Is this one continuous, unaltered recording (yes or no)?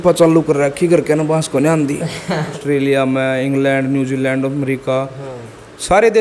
no